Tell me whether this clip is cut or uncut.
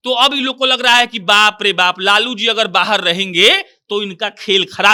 uncut